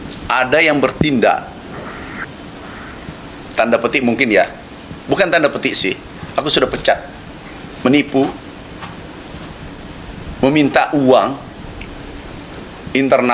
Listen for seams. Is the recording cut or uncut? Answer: cut